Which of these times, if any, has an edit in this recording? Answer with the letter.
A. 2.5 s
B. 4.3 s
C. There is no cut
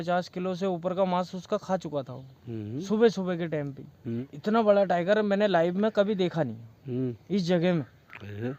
B